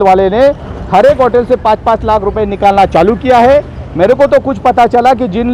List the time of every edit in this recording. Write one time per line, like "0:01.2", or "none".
none